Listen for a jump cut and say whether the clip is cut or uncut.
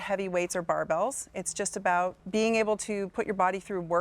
cut